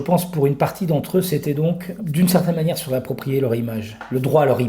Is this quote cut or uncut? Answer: cut